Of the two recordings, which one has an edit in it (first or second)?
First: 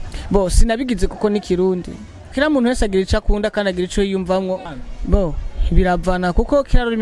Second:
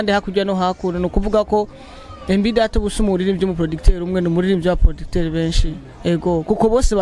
first